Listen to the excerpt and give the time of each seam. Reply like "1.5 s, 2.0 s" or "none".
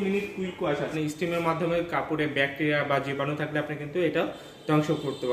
0.9 s